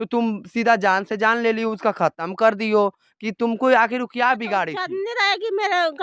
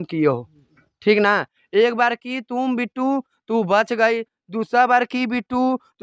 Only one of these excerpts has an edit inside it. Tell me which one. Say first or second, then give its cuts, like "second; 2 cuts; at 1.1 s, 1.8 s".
first; 1 cut; at 4.9 s